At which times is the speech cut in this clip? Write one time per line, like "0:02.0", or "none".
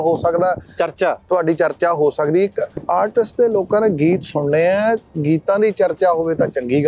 0:02.7